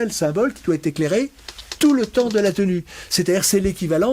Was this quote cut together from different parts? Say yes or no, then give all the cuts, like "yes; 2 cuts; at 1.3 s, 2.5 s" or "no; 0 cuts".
no; 0 cuts